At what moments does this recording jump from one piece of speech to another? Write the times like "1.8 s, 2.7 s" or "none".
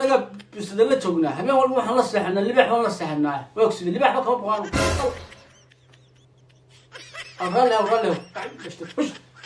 none